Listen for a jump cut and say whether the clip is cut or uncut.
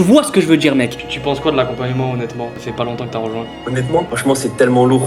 cut